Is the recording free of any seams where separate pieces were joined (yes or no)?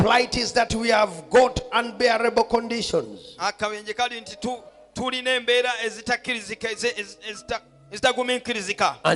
yes